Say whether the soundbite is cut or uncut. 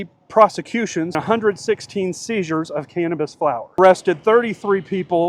cut